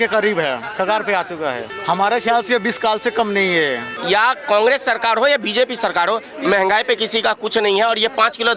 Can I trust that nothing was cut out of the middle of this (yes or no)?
no